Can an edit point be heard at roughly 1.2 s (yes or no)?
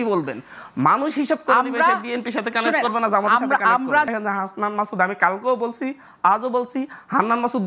no